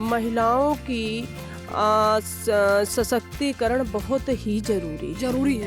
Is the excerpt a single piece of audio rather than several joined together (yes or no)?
yes